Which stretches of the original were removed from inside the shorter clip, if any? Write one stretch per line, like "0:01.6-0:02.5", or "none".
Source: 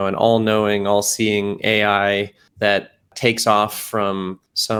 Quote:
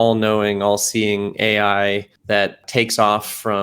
0:02.6-0:02.8